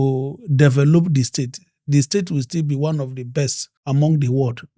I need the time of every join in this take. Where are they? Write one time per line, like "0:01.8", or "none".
0:03.7